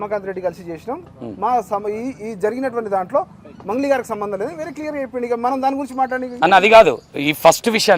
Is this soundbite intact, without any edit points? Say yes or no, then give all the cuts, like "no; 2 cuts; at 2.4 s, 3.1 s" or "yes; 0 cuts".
yes; 0 cuts